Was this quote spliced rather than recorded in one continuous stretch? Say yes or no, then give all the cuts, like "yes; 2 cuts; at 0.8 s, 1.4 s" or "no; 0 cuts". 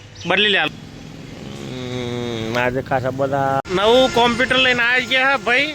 yes; 1 cut; at 3.6 s